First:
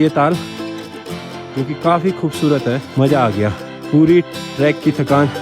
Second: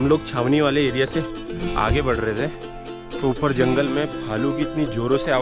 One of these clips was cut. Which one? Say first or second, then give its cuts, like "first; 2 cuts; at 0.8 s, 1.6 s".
first; 2 cuts; at 2.9 s, 3.7 s